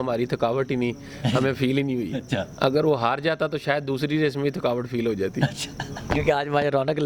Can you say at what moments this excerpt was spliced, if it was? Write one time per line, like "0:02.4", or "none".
none

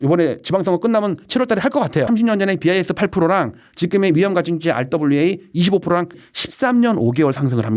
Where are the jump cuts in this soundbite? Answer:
0:02.1
0:06.3

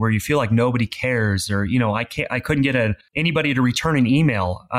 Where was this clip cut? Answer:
0:03.1

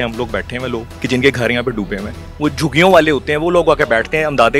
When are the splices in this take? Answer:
0:00.9
0:02.2

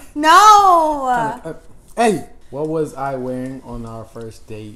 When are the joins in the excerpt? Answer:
0:02.3

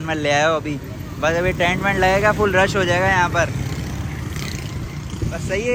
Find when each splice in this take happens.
none

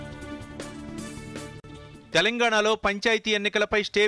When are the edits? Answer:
none

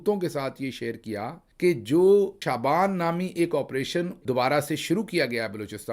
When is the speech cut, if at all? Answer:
0:02.4
0:04.2

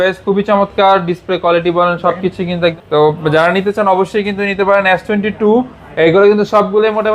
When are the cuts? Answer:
0:02.8

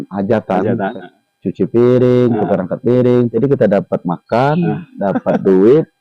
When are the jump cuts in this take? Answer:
0:01.0
0:03.3

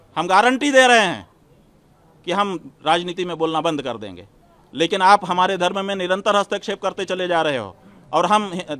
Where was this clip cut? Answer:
none

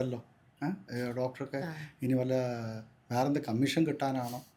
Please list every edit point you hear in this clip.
none

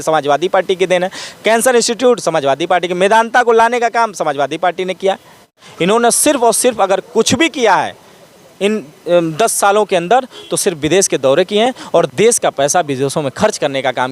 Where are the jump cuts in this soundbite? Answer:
0:05.7

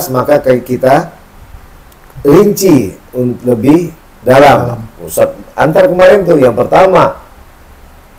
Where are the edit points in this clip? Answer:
none

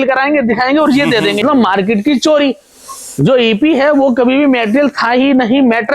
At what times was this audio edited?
0:01.4

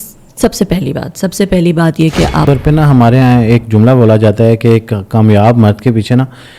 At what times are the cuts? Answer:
0:02.4

